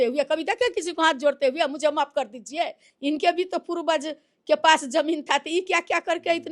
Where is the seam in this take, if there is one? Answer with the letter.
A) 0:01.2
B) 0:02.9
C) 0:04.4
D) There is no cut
B